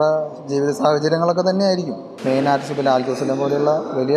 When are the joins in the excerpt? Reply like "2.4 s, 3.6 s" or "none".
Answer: 2.1 s